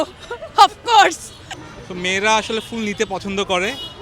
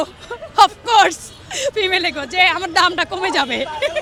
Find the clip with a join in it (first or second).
first